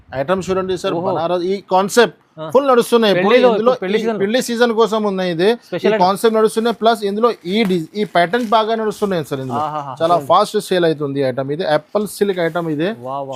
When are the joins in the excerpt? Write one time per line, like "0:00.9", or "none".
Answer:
none